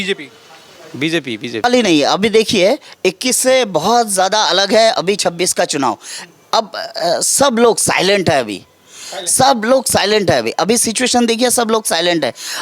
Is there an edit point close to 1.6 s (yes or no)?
yes